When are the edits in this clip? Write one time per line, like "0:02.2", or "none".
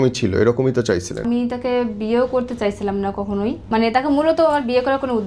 0:01.2
0:03.6